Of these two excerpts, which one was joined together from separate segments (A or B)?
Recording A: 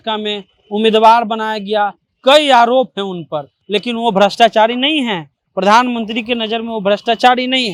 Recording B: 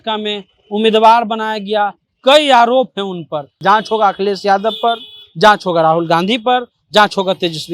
B